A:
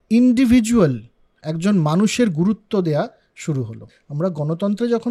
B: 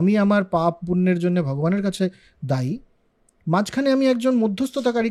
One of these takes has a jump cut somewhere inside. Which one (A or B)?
A